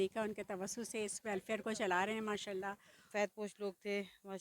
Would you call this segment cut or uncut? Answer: cut